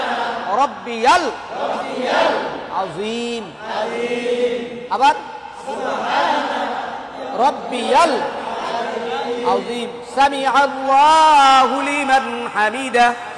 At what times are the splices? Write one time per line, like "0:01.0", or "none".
none